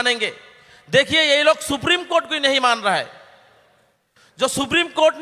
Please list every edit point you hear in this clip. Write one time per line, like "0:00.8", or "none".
none